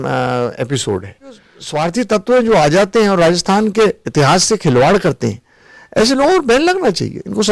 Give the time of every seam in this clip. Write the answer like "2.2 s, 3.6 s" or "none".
1.5 s, 6.0 s